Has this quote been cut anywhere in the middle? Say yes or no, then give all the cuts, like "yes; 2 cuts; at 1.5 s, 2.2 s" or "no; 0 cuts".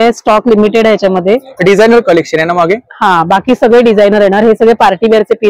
no; 0 cuts